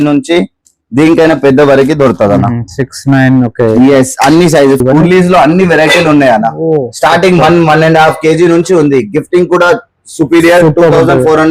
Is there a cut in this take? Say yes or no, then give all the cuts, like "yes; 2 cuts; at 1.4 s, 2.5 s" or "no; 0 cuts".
yes; 1 cut; at 4.8 s